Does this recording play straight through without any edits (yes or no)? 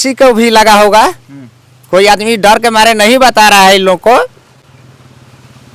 yes